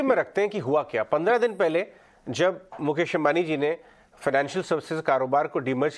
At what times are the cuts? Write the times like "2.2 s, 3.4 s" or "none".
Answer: none